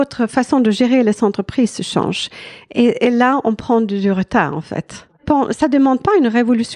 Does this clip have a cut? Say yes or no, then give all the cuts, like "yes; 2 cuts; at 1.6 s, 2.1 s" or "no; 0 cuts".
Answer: yes; 1 cut; at 5.2 s